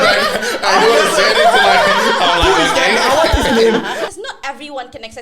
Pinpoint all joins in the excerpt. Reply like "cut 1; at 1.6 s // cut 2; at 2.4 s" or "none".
cut 1; at 4.0 s